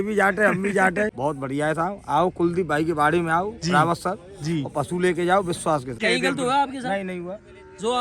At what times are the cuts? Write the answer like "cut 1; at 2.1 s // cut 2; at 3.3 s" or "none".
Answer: cut 1; at 1.1 s // cut 2; at 5.9 s